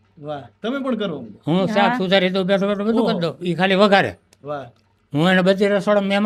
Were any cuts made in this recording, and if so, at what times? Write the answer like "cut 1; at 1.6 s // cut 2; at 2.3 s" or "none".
none